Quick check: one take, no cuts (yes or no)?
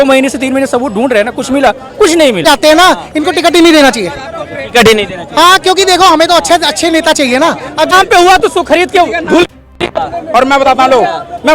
no